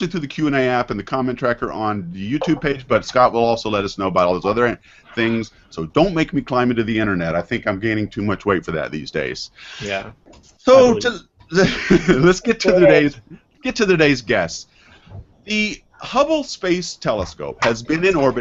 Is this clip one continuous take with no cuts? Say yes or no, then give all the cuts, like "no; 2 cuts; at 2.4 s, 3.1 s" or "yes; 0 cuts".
yes; 0 cuts